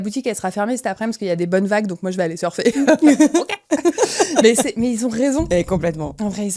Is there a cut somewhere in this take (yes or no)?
no